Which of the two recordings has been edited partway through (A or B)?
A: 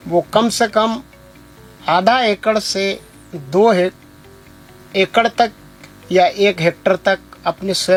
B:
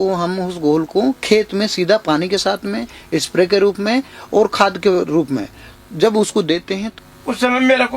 B